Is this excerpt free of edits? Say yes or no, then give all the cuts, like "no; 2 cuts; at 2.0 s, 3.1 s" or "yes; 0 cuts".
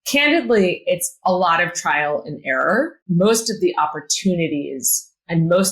no; 1 cut; at 3.0 s